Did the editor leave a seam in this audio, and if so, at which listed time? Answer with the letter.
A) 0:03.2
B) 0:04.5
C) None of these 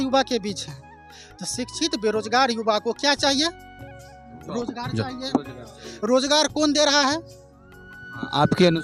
C